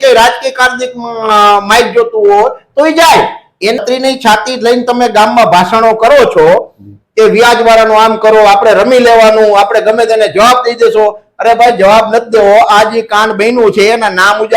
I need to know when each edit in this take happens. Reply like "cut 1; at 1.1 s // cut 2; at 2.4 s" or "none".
cut 1; at 3.8 s // cut 2; at 12.9 s